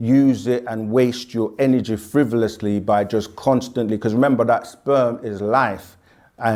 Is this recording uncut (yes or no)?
yes